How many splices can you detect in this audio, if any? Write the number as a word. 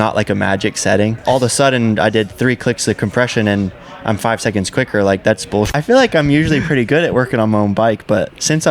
two